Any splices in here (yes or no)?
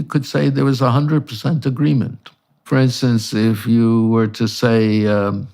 yes